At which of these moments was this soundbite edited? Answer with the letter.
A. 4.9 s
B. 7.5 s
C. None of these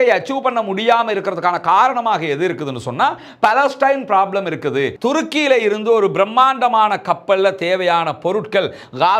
A